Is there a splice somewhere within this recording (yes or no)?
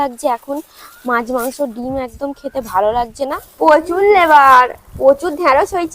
yes